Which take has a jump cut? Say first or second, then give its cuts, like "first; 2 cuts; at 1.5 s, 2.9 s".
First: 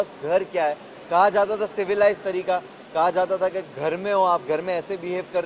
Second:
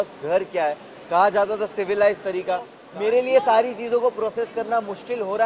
second; 1 cut; at 2.8 s